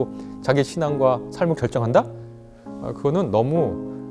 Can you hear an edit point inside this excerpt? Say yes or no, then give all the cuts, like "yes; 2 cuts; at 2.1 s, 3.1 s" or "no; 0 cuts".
no; 0 cuts